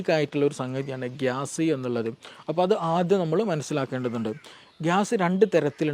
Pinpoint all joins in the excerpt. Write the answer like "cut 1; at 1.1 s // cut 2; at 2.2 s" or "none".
cut 1; at 4.5 s